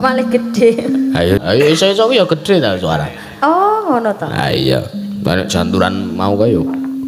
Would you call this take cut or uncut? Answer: cut